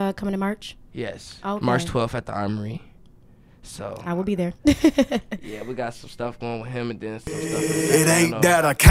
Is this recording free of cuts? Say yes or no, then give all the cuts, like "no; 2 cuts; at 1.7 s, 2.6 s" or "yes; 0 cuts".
no; 1 cut; at 7.2 s